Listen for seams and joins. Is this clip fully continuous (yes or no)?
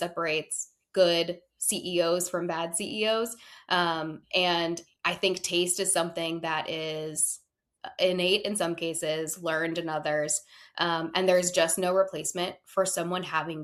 yes